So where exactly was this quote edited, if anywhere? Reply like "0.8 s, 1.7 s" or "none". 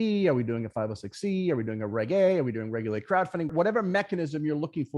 3.5 s